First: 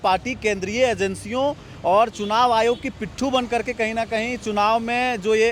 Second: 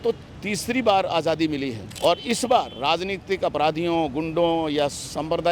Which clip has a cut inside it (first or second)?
second